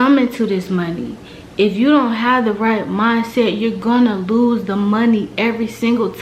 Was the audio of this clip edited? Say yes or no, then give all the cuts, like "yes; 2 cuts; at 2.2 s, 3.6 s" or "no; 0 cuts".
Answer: no; 0 cuts